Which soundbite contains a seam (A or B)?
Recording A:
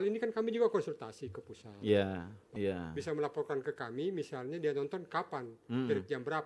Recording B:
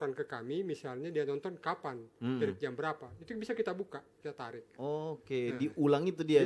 A